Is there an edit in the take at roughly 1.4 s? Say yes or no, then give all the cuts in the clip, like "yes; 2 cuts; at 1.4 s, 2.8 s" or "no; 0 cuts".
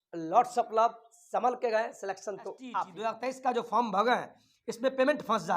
no; 1 cut; at 2.9 s